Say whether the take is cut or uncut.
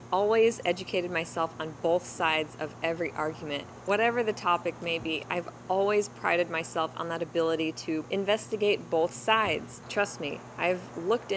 cut